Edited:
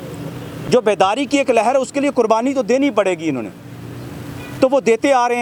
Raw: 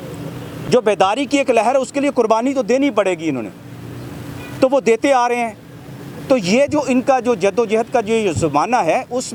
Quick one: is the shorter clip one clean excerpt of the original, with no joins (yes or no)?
yes